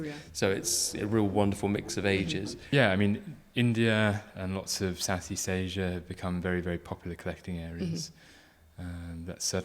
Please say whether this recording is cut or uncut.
cut